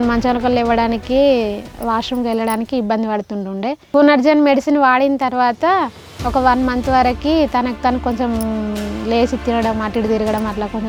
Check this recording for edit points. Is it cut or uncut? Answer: uncut